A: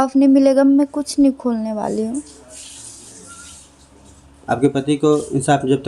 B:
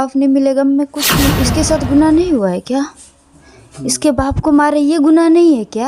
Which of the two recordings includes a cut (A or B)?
B